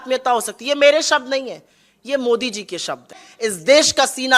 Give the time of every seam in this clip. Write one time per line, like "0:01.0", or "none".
0:03.2